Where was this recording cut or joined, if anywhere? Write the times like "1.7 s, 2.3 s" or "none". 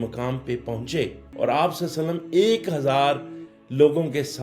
1.2 s